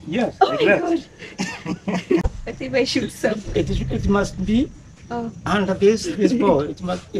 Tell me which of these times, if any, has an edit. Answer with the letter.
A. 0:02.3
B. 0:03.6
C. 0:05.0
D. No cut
A